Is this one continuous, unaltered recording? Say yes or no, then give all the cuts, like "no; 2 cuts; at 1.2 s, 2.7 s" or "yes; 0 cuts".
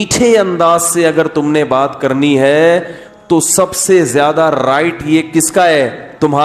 yes; 0 cuts